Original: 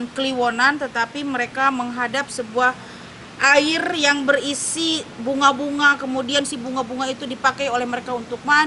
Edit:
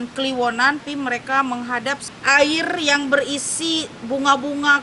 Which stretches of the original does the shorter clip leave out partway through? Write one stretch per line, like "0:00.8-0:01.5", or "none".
0:00.8-0:01.1
0:02.4-0:03.2